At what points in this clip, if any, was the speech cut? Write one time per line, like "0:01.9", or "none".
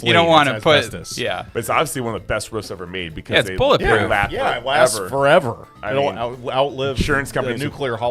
none